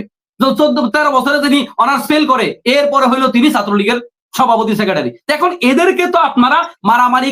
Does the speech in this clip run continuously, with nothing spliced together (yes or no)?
yes